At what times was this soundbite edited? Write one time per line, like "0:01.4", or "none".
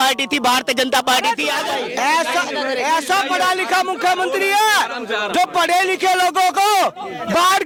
none